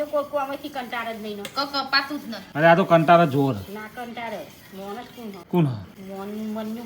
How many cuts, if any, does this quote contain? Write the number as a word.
three